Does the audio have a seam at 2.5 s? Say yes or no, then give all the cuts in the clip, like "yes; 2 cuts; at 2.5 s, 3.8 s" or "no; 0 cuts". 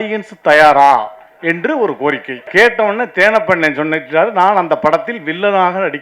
yes; 1 cut; at 2.5 s